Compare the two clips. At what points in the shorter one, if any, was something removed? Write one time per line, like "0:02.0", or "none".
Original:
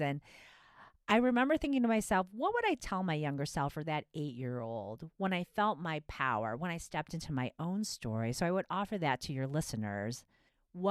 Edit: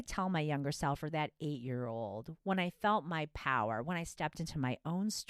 none